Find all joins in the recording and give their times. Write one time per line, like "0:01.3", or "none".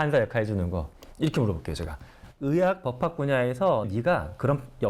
0:00.9
0:03.9